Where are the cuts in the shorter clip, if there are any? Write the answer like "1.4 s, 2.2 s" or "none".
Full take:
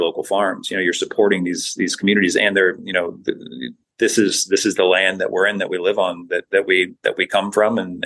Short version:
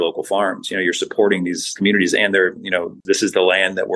1.7 s, 3.0 s